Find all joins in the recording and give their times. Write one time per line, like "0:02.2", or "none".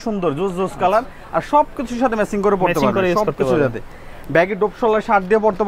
none